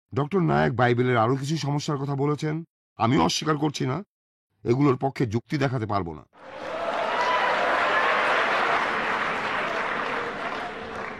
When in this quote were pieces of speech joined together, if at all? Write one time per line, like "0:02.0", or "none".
0:06.6
0:08.8